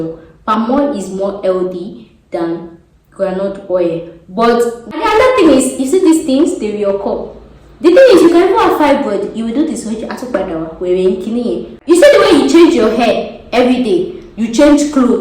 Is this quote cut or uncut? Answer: cut